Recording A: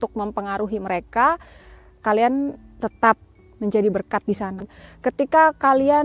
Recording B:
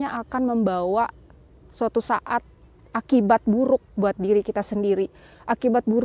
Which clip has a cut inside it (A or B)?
A